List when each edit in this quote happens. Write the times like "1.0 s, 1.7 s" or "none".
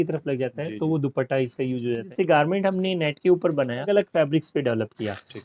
2.1 s, 3.9 s

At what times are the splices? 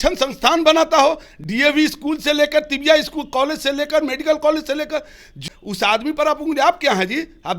5.5 s

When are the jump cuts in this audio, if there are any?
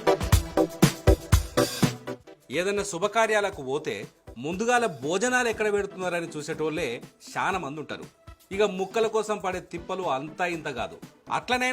1.8 s

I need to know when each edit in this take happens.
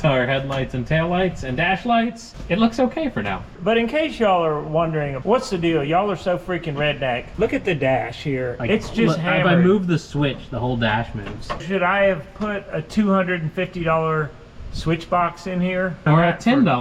11.6 s, 12.8 s, 16.0 s

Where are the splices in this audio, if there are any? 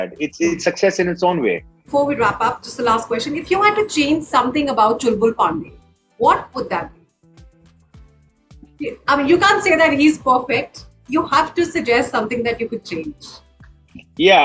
none

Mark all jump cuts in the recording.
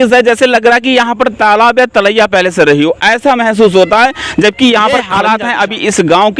5.1 s

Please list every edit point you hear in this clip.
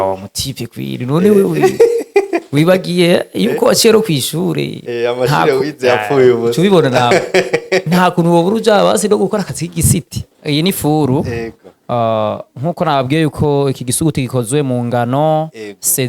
10.2 s

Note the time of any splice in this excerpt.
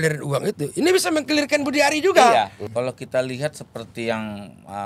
2.6 s

